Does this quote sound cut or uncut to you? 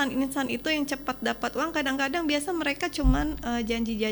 uncut